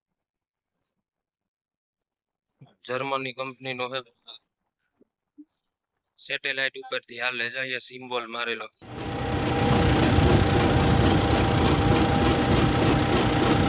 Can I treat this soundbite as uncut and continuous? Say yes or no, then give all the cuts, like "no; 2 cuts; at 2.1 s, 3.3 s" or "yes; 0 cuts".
no; 1 cut; at 8.9 s